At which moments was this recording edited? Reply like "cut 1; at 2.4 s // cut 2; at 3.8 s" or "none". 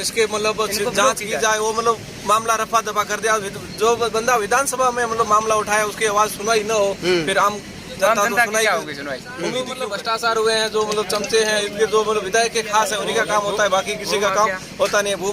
cut 1; at 9.8 s